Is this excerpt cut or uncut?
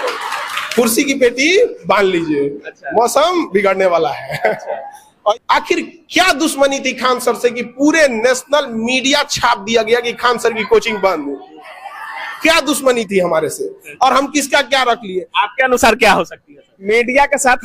cut